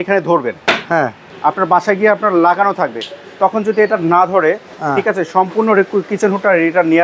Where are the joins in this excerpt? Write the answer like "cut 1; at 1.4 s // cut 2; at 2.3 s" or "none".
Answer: cut 1; at 1.2 s